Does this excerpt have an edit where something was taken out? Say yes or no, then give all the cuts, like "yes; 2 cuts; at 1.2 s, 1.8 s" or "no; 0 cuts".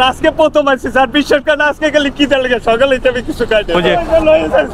yes; 1 cut; at 3.7 s